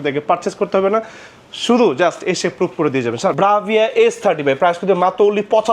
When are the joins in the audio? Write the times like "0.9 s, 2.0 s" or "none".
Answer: 3.4 s